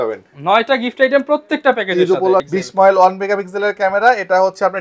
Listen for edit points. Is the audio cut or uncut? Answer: cut